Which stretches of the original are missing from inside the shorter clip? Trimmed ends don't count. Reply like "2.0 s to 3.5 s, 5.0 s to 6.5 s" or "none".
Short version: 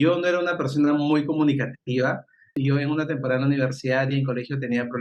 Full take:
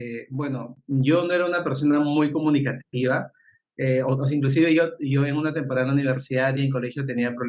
3.6 s to 5.0 s